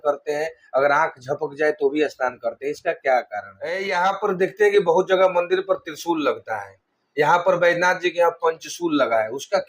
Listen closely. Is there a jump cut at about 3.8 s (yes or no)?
yes